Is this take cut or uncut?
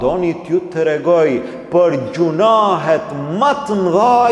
uncut